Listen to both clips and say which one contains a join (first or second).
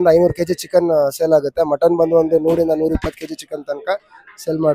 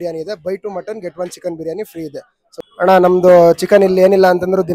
second